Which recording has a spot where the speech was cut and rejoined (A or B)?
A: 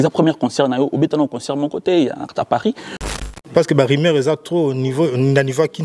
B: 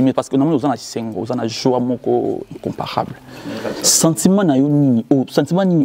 A